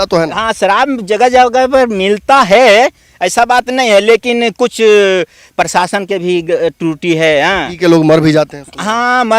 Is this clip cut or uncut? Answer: uncut